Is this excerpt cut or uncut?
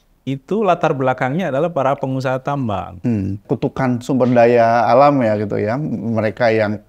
cut